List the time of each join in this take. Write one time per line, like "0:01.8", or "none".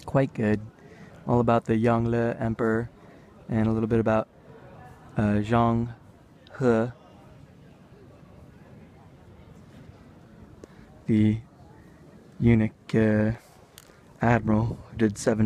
0:06.3